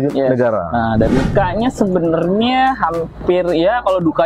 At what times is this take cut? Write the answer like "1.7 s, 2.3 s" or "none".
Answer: 1.1 s